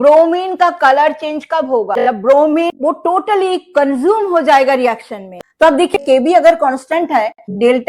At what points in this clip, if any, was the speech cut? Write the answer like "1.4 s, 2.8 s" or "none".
1.9 s, 5.2 s